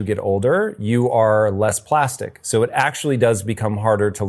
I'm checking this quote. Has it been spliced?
no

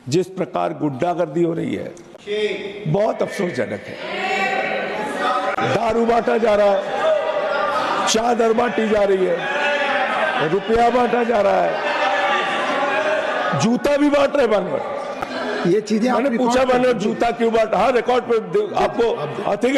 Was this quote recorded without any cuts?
yes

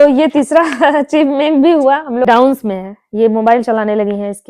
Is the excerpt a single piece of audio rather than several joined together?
no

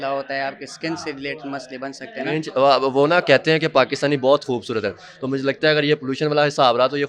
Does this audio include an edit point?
no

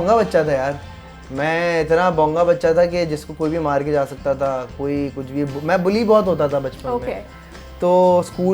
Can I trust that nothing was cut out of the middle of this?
yes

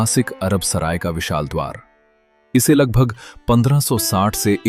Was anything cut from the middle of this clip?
no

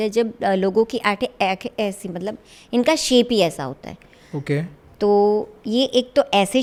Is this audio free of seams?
yes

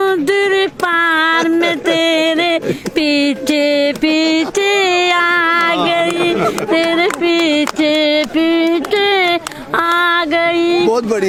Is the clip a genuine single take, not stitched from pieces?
yes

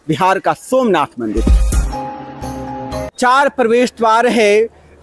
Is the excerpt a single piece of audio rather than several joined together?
no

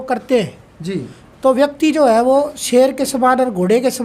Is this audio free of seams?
yes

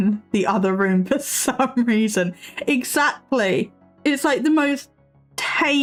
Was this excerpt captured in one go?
yes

